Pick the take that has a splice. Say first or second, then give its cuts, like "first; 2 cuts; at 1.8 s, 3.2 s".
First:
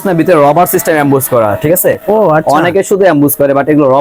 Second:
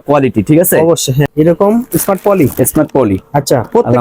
second; 1 cut; at 1.3 s